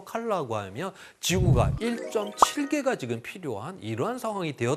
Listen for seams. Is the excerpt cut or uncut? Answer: uncut